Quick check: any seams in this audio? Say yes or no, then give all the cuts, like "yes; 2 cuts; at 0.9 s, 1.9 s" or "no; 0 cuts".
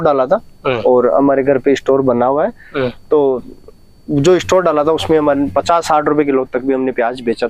no; 0 cuts